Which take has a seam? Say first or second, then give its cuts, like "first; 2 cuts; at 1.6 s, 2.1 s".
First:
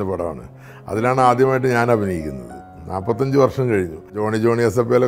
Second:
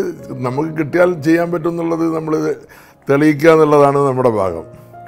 first; 1 cut; at 4.0 s